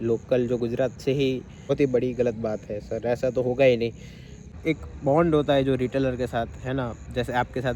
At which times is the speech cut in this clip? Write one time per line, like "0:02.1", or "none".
0:01.7
0:04.6

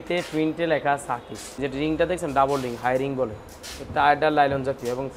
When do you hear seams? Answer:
0:01.6

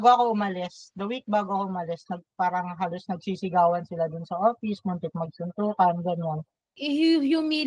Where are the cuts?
0:06.7

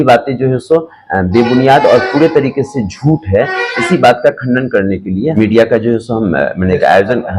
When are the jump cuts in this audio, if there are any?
0:05.3

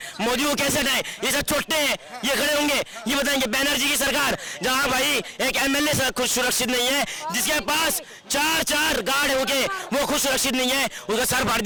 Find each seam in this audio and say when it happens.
none

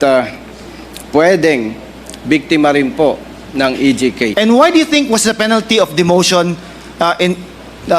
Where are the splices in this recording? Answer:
0:04.3

